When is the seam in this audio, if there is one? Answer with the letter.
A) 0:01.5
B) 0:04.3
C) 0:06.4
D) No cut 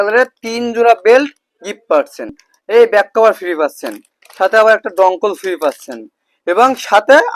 D